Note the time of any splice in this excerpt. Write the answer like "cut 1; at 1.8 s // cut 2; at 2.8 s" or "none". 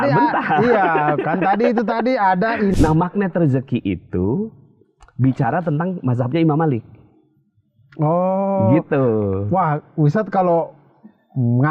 cut 1; at 2.7 s